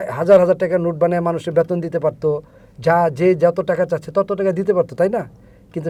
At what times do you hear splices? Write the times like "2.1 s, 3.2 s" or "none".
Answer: none